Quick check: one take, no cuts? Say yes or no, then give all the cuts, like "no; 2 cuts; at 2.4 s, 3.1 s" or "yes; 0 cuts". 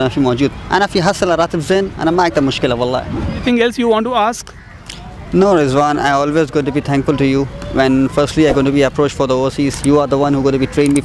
no; 1 cut; at 3.4 s